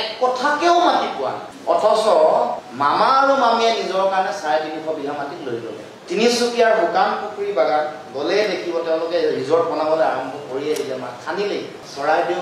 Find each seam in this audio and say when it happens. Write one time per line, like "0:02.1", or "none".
none